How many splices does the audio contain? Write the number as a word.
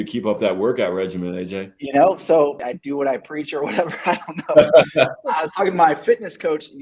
one